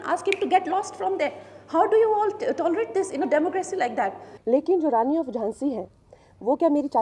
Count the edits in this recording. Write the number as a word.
one